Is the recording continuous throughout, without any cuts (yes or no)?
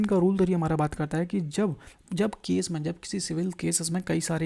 yes